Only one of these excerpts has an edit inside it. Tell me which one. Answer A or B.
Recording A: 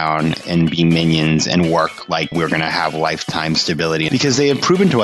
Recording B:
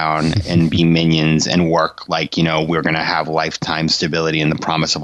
A